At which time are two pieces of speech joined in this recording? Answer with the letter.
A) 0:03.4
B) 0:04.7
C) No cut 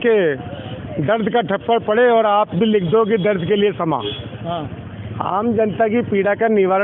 C